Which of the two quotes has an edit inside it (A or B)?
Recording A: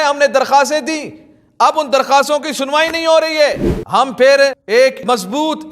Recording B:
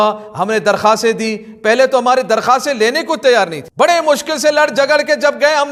A